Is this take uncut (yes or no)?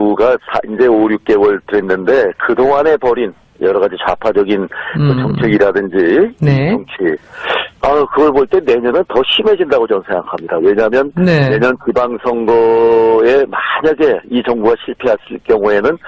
no